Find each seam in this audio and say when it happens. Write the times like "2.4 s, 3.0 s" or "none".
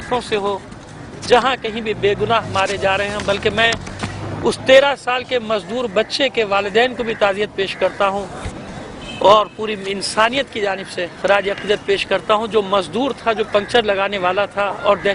6.5 s